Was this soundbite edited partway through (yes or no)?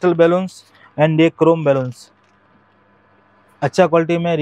no